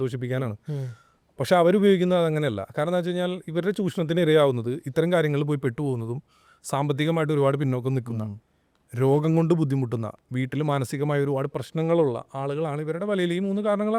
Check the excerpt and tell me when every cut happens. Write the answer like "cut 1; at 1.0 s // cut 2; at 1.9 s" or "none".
none